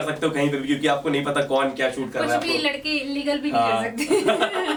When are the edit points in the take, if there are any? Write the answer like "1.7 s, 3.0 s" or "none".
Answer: none